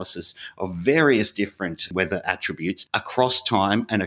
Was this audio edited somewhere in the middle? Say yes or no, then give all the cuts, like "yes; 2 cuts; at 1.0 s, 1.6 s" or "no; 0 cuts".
yes; 2 cuts; at 1.8 s, 2.8 s